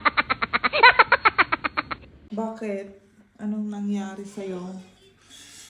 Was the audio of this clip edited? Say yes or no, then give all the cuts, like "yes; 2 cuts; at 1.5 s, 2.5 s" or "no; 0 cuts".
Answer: yes; 1 cut; at 2.1 s